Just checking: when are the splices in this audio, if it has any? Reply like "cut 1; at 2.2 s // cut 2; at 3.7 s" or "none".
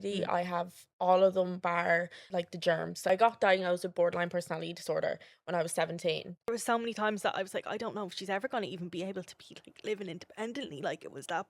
cut 1; at 2.5 s // cut 2; at 6.5 s